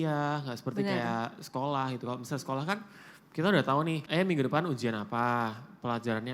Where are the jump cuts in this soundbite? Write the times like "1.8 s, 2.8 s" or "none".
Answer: 4.0 s